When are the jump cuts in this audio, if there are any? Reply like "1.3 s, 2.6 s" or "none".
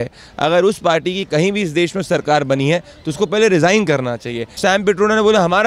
4.5 s